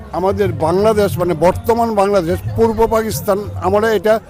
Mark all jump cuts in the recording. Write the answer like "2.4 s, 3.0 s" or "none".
none